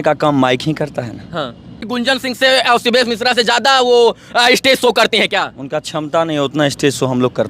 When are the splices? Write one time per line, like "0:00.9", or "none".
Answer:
0:01.8